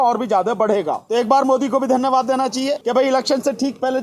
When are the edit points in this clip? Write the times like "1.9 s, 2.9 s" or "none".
1.0 s, 2.8 s